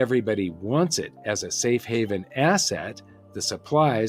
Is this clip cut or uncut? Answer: uncut